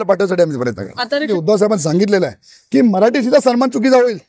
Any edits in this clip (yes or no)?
yes